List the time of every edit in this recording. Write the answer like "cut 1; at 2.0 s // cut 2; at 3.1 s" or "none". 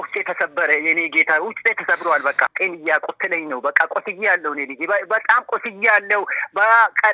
cut 1; at 2.5 s